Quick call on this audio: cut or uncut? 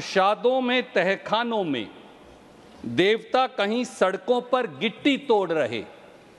uncut